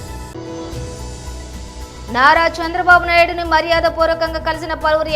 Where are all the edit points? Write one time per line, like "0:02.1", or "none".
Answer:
0:01.8

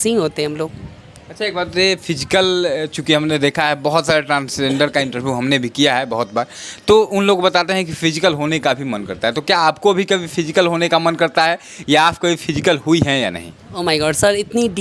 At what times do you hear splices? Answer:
none

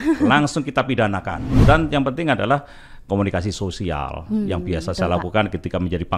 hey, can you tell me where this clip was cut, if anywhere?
0:01.4

